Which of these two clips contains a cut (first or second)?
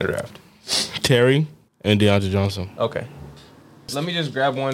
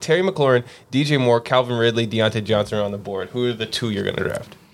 first